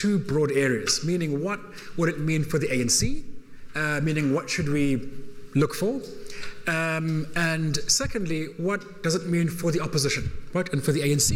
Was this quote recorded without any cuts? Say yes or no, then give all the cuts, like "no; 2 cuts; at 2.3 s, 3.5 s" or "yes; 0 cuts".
yes; 0 cuts